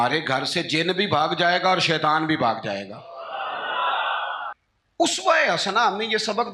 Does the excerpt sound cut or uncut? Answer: cut